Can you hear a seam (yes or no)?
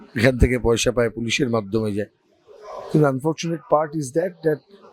no